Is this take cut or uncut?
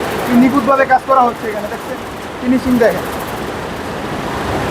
uncut